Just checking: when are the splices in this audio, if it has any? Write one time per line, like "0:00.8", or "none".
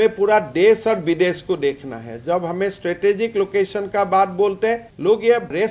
none